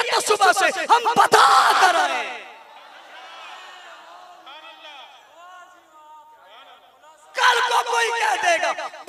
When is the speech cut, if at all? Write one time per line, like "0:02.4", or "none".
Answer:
none